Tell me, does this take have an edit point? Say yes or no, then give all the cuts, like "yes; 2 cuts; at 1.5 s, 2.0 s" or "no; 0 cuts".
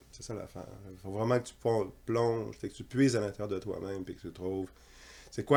no; 0 cuts